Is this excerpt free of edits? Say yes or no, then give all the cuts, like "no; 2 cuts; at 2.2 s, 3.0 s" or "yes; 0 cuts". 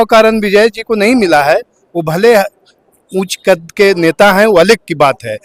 yes; 0 cuts